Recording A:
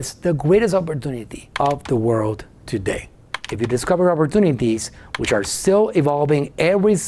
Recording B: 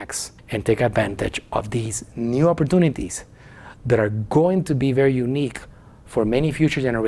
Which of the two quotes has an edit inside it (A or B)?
A